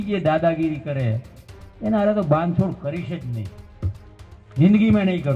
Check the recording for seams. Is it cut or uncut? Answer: uncut